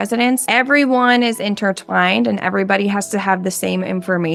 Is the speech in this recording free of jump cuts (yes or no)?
yes